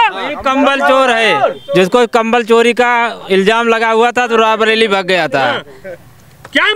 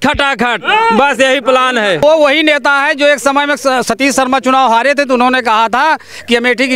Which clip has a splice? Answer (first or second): second